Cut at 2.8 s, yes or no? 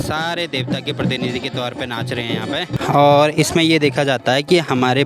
yes